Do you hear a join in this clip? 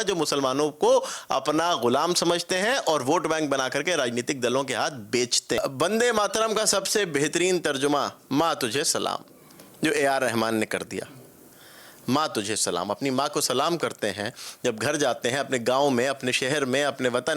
yes; 1 cut; at 5.6 s

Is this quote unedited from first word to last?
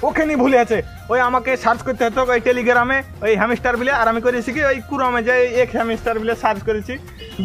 yes; 0 cuts

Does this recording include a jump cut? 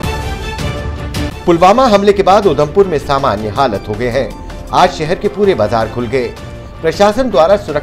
yes; 1 cut; at 1.4 s

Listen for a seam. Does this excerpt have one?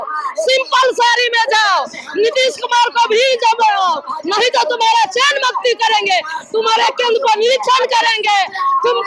no; 0 cuts

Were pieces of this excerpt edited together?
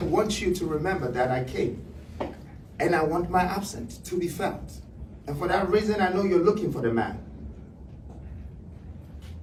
no; 0 cuts

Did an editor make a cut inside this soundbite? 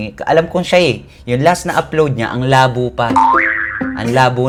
no; 0 cuts

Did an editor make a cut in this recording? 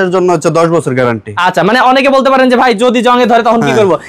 no; 0 cuts

